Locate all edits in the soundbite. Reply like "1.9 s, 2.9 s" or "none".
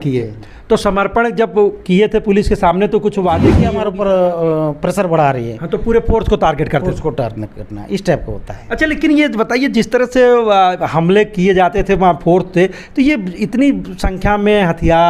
3.7 s